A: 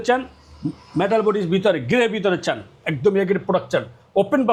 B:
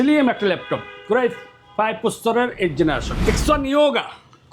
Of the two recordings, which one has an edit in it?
B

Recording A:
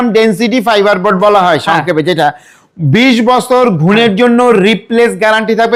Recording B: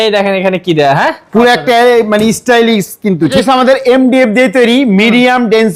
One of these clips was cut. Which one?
B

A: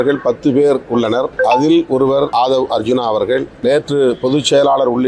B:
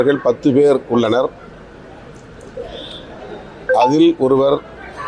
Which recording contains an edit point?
A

